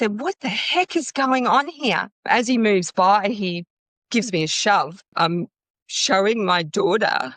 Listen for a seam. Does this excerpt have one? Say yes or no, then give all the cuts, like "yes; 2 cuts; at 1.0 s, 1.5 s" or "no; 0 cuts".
yes; 2 cuts; at 2.1 s, 5.1 s